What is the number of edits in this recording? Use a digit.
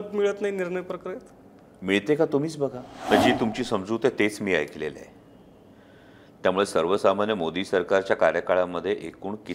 1